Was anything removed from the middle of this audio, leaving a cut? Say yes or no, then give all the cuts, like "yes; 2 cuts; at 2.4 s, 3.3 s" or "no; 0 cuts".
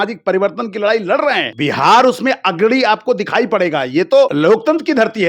yes; 2 cuts; at 1.5 s, 4.3 s